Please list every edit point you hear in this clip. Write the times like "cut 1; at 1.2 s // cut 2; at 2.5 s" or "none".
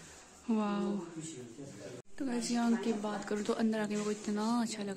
cut 1; at 2.0 s